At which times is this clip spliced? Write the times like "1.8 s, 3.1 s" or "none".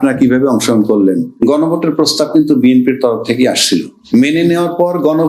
1.3 s, 4.0 s